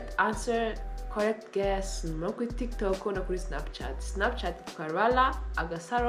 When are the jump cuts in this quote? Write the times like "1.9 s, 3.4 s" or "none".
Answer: none